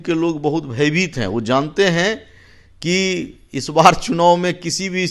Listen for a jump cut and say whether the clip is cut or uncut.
uncut